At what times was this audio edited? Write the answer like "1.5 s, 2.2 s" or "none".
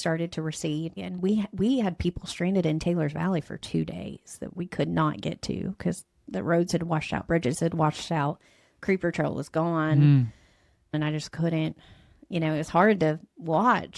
1.0 s, 10.9 s